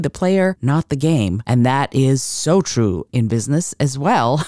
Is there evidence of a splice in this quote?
yes; 2 cuts; at 0.9 s, 3.1 s

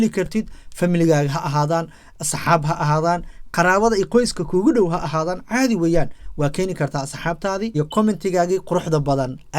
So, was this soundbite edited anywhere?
yes; 1 cut; at 7.7 s

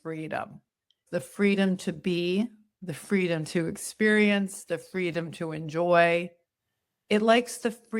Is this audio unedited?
no; 1 cut; at 1.0 s

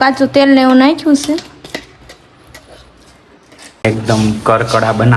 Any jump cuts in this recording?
yes; 1 cut; at 3.8 s

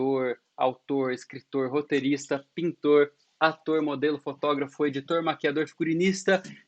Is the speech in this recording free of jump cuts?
yes; 0 cuts

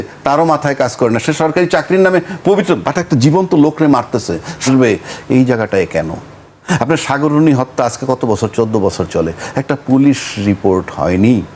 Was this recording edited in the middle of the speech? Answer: yes; 1 cut; at 4.7 s

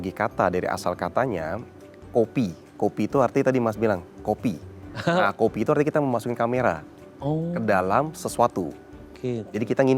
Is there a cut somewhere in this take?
no; 0 cuts

